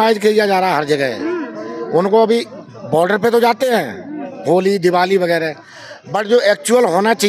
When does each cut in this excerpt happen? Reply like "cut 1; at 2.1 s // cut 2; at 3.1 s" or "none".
none

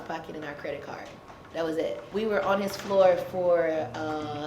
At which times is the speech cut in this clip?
cut 1; at 2.0 s

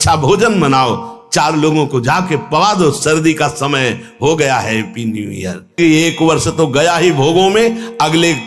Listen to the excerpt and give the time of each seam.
cut 1; at 5.8 s

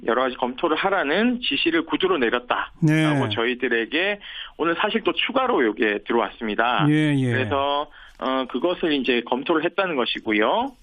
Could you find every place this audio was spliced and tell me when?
cut 1; at 4.7 s

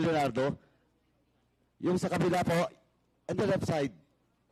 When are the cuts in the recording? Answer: none

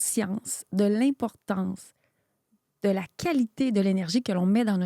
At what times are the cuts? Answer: none

